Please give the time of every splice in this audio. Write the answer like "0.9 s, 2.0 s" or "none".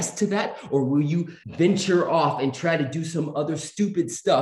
1.4 s